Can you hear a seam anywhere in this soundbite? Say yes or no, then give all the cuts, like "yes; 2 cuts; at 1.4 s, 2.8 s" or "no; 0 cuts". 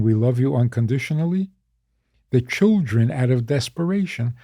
no; 0 cuts